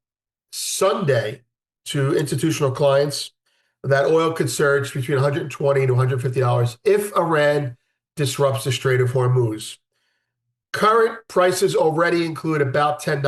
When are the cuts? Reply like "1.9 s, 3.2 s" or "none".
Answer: none